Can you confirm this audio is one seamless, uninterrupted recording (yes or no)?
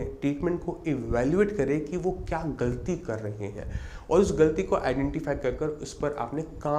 yes